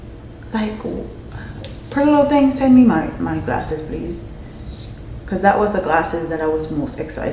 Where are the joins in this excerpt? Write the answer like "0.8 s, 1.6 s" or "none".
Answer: none